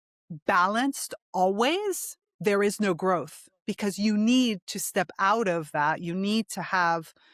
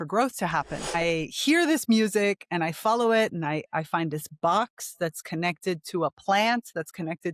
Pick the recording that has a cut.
second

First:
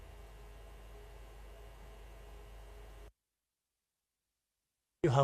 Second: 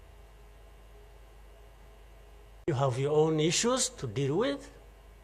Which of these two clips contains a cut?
second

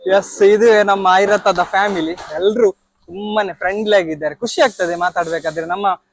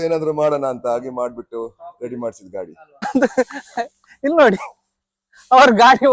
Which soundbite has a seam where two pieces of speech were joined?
second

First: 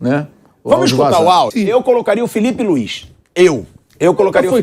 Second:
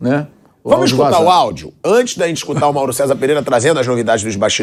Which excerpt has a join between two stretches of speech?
first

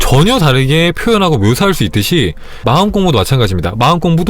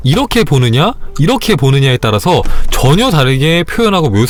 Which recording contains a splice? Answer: first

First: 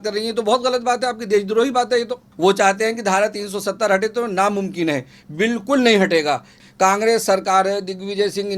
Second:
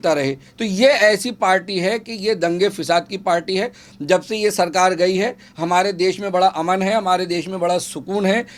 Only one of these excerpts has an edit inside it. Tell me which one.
first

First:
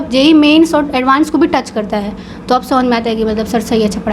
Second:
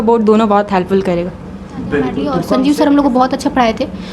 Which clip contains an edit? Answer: second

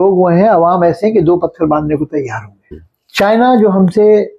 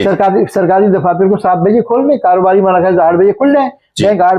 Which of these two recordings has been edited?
first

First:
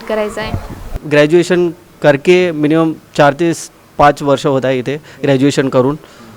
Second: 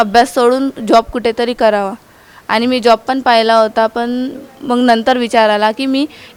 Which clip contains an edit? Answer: first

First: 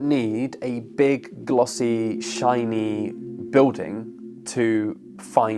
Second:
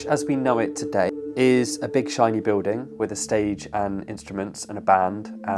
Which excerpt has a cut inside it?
second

